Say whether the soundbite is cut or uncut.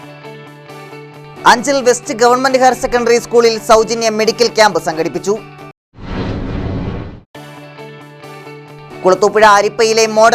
cut